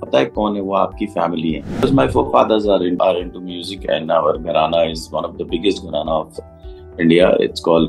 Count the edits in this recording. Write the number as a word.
two